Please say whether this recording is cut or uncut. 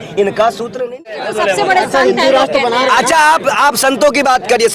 cut